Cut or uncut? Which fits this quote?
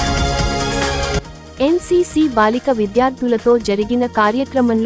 uncut